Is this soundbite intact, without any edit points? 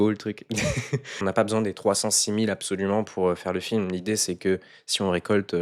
no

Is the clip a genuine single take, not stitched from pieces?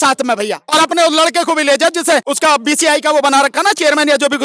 no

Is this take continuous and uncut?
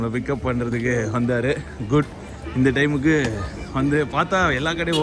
yes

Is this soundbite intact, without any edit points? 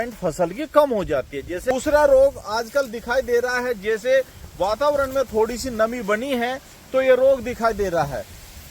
no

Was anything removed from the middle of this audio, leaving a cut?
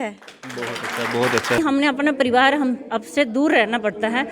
yes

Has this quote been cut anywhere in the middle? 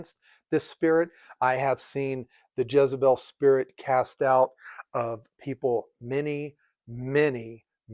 no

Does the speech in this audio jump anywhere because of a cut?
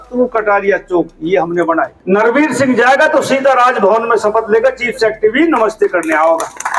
yes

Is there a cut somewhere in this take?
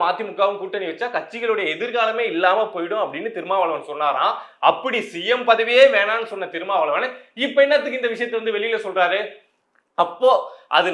no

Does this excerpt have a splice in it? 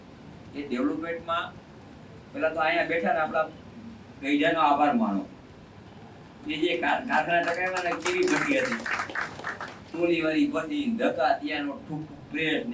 no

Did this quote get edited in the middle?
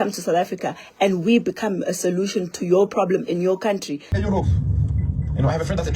yes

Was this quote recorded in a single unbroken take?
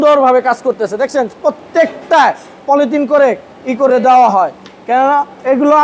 yes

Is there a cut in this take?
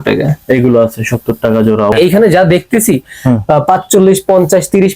yes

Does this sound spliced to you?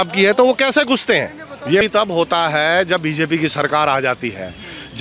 yes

